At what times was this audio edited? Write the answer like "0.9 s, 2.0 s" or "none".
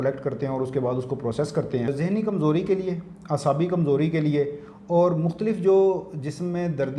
1.9 s